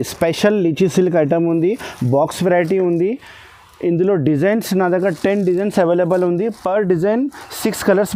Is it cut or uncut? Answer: uncut